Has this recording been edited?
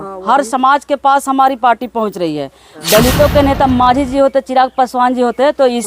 yes; 1 cut; at 2.7 s

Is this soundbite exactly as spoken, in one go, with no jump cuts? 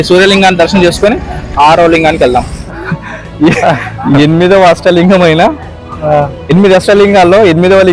no; 1 cut; at 2.6 s

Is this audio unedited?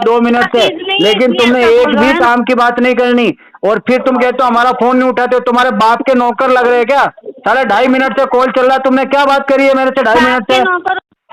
yes; 0 cuts

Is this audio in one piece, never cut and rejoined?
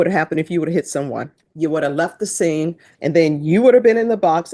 no; 2 cuts; at 1.4 s, 2.9 s

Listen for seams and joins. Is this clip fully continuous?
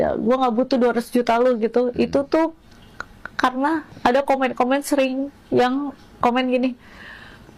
yes; 0 cuts

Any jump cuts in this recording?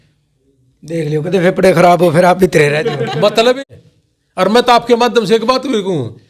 yes; 1 cut; at 3.6 s

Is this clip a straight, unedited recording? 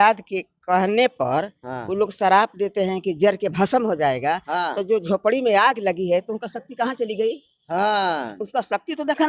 yes; 0 cuts

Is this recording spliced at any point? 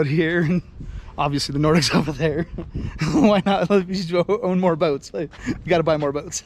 no; 0 cuts

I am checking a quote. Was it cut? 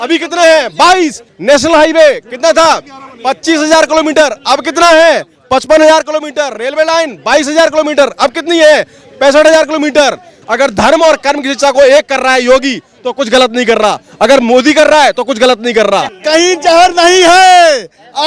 yes; 3 cuts; at 1.3 s, 10.3 s, 16.1 s

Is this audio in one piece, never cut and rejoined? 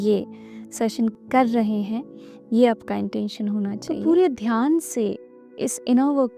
no; 2 cuts; at 1.1 s, 3.8 s

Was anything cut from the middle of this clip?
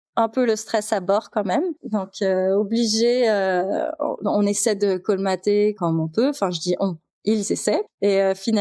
yes; 3 cuts; at 1.8 s, 5.8 s, 7.1 s

